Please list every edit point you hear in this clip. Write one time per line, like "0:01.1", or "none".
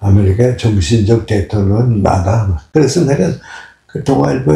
0:02.6